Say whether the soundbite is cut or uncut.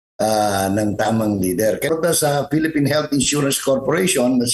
cut